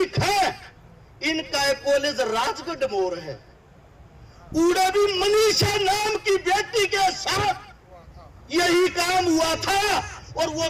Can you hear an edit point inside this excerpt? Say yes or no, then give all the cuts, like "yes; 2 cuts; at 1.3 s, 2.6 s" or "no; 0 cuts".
no; 0 cuts